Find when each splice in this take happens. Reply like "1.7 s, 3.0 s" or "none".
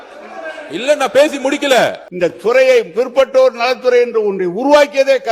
2.0 s